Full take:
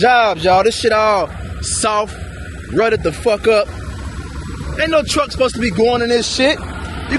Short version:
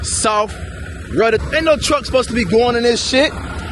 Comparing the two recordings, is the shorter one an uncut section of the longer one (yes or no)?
no